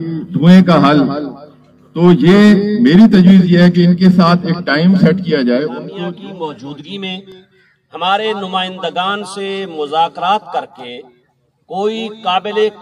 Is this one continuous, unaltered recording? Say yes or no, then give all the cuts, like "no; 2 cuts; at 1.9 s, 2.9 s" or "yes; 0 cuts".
no; 1 cut; at 5.8 s